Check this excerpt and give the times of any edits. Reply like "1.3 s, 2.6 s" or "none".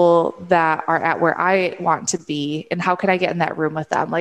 none